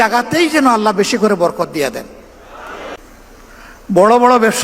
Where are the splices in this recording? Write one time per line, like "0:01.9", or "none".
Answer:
0:03.0